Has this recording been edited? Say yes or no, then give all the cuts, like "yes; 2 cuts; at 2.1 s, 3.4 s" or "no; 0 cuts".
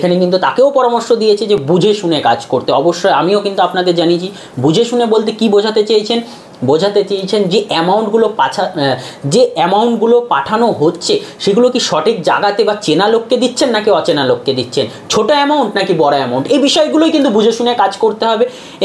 no; 0 cuts